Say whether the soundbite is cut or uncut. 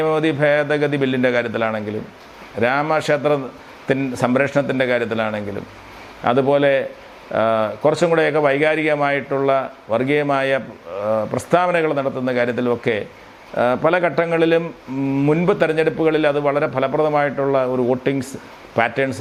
uncut